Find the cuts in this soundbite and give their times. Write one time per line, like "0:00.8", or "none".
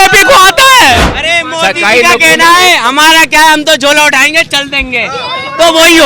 0:01.1

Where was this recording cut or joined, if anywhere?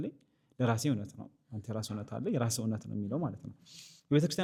none

